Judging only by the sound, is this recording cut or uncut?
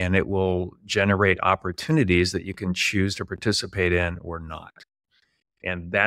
uncut